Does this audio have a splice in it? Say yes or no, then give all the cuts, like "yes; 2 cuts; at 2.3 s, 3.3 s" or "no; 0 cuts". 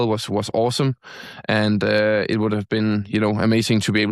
no; 0 cuts